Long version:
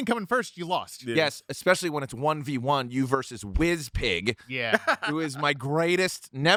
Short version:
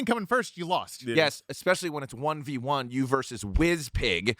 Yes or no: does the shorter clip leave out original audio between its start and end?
no